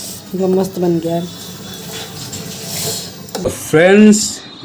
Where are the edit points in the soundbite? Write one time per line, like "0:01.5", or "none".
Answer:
0:03.5